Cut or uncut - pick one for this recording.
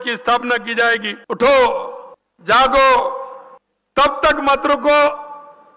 cut